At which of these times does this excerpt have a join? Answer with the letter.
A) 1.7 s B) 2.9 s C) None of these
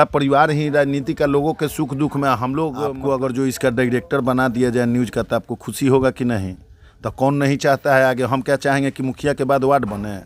B